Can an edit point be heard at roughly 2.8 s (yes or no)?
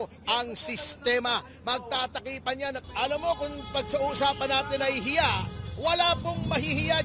yes